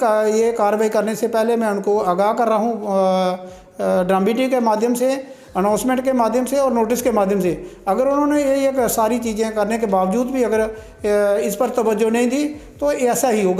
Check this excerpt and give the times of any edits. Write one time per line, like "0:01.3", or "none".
none